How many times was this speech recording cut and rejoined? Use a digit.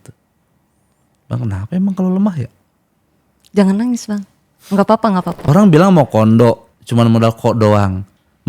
2